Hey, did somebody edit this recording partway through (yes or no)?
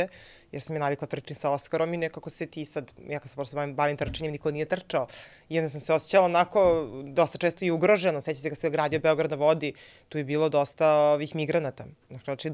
no